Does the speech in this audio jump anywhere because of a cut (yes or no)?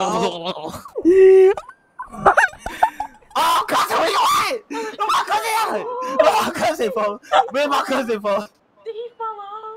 no